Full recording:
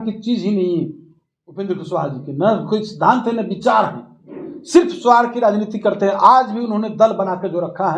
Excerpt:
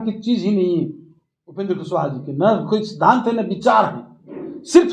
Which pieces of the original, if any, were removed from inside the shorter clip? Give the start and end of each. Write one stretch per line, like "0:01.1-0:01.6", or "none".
none